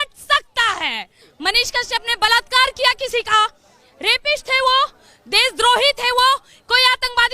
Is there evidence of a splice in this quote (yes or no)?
yes